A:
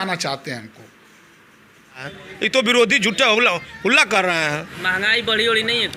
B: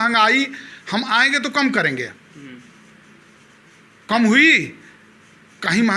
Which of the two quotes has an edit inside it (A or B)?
A